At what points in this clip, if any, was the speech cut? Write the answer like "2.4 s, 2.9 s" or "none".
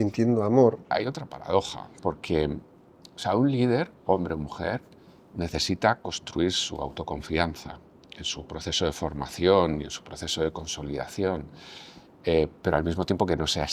0.9 s